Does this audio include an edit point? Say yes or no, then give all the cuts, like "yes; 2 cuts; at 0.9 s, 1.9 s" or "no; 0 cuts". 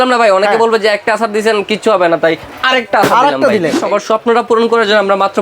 yes; 1 cut; at 3.8 s